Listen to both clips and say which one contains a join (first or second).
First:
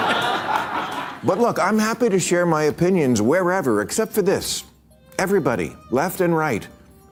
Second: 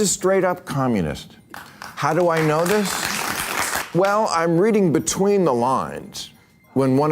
second